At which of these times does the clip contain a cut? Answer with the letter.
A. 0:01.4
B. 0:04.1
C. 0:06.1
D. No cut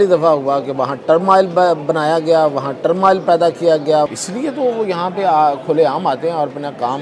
B